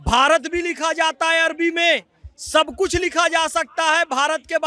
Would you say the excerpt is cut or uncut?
uncut